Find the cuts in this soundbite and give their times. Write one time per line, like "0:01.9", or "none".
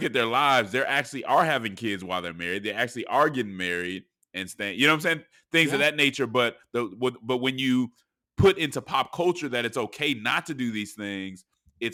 none